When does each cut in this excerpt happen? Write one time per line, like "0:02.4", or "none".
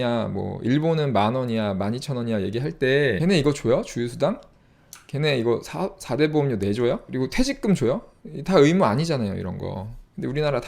0:03.2
0:07.1